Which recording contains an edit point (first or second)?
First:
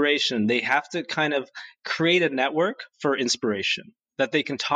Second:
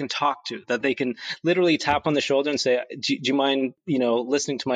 second